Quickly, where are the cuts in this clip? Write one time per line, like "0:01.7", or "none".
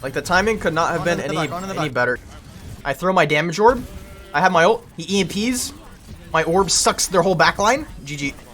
0:02.3